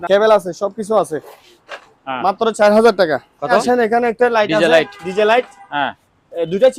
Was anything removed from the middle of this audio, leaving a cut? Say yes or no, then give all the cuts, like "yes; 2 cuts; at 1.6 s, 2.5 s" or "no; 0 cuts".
yes; 1 cut; at 3.6 s